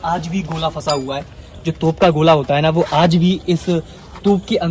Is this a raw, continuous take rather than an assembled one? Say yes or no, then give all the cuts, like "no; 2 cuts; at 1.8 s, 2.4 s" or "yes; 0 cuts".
yes; 0 cuts